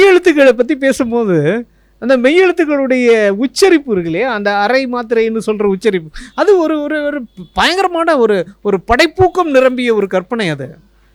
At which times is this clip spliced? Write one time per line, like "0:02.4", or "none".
none